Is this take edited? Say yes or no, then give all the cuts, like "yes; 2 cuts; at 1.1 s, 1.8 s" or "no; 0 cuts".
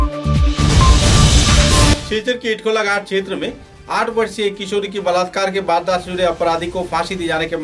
yes; 1 cut; at 2.0 s